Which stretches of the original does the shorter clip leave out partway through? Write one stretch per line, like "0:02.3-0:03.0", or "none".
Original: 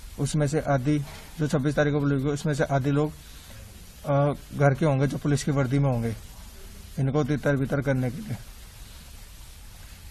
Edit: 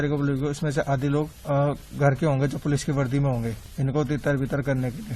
0:03.2-0:04.0
0:06.2-0:06.8